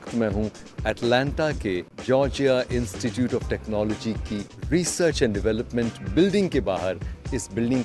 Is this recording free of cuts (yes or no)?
no